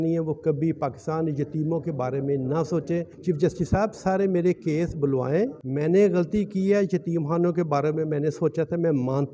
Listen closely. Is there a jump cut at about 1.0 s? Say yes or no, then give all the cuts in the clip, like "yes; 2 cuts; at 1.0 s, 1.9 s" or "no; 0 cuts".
no; 2 cuts; at 3.1 s, 5.6 s